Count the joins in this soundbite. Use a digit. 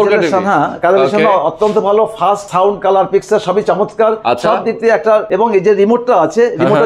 2